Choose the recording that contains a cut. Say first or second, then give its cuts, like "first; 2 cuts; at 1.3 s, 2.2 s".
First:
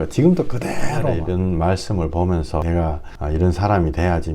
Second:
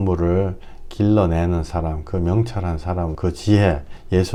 first; 1 cut; at 1.2 s